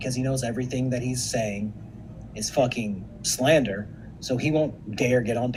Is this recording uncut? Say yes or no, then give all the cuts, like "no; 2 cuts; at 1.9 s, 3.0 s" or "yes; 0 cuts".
yes; 0 cuts